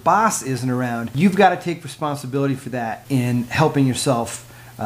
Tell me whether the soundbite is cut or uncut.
cut